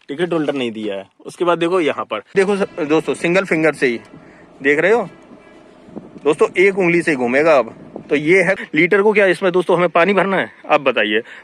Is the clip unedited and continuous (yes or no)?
no